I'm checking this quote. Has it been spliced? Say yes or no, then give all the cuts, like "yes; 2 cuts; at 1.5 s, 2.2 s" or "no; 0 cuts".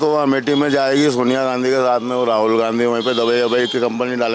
no; 0 cuts